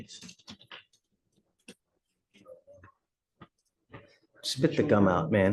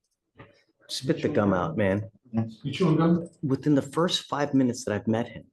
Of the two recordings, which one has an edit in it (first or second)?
second